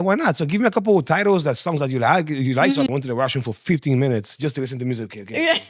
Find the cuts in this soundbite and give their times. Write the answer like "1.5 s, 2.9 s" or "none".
2.9 s